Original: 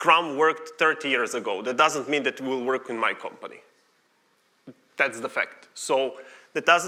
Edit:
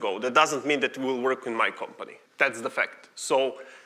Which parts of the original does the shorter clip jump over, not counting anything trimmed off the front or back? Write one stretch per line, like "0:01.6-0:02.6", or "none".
0:03.6-0:04.8